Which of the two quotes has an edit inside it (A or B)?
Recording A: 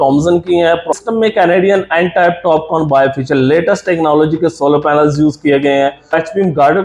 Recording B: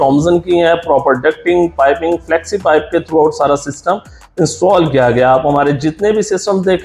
A